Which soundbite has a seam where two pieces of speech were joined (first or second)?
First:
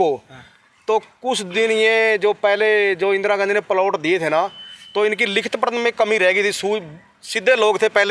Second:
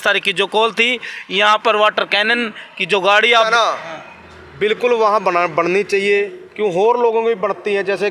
second